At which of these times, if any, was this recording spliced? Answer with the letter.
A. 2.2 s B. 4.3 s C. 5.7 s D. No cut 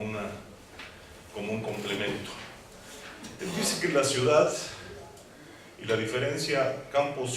B